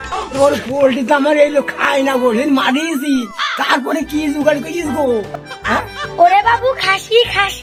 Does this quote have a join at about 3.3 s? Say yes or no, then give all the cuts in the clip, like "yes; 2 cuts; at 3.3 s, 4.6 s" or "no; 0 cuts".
no; 0 cuts